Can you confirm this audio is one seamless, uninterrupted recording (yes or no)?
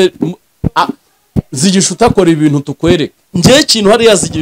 no